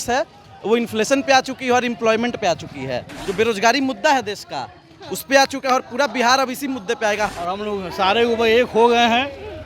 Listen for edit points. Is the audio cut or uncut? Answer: cut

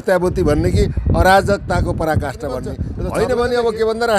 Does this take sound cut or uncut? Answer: cut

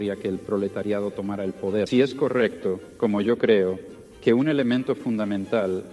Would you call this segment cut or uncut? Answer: cut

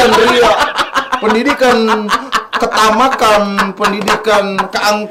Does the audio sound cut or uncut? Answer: uncut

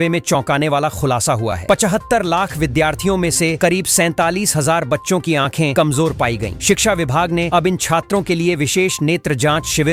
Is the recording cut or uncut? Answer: uncut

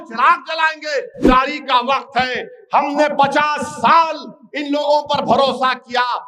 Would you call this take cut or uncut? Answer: cut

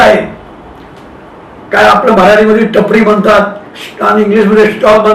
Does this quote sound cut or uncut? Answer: uncut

